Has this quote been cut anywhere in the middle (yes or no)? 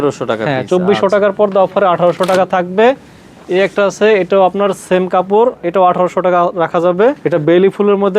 yes